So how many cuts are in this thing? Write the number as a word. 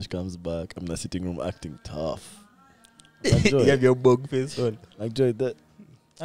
zero